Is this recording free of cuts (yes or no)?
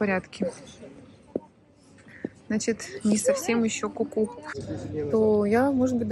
no